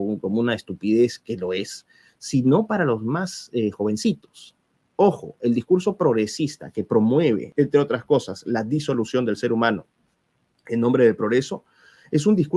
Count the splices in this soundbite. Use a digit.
1